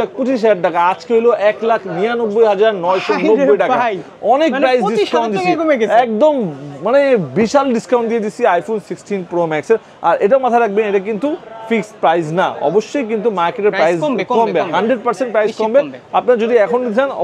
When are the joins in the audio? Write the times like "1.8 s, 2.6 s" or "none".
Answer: none